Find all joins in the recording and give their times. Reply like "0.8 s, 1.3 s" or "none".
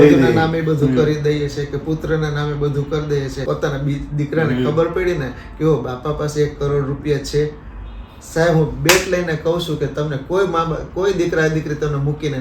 3.4 s